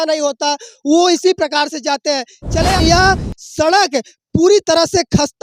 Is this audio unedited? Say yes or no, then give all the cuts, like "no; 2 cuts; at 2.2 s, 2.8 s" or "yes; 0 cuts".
no; 1 cut; at 2.8 s